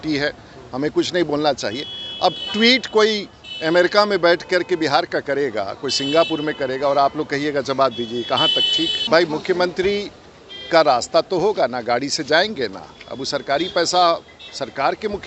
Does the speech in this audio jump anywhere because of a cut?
yes; 1 cut; at 9.0 s

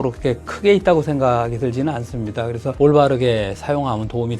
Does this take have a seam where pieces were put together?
yes; 1 cut; at 2.7 s

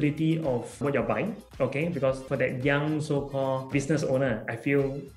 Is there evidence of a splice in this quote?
yes; 3 cuts; at 0.8 s, 2.2 s, 3.7 s

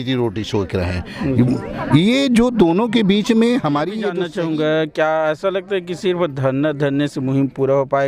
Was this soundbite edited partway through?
yes; 1 cut; at 4.2 s

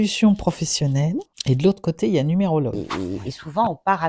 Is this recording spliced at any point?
yes; 2 cuts; at 1.3 s, 2.8 s

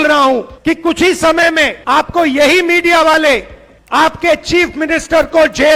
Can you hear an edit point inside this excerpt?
no; 0 cuts

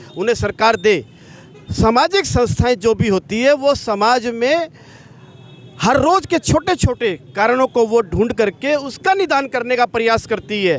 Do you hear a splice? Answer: no; 0 cuts

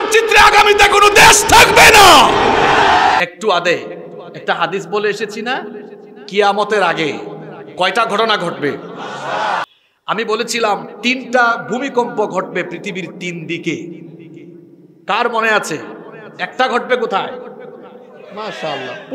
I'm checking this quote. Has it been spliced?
yes; 2 cuts; at 3.2 s, 9.6 s

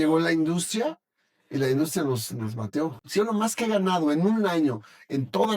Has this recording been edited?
yes; 1 cut; at 3.0 s

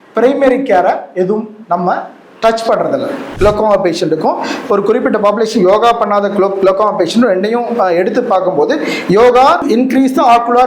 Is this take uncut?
no; 1 cut; at 3.4 s

